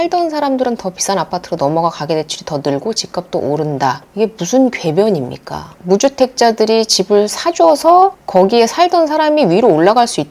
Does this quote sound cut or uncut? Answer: cut